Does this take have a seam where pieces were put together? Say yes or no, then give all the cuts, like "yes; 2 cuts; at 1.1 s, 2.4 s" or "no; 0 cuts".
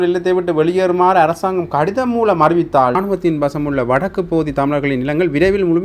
yes; 1 cut; at 3.0 s